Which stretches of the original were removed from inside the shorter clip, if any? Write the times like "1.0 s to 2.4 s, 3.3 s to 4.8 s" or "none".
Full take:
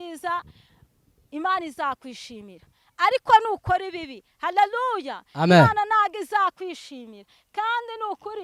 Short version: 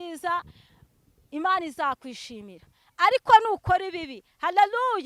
none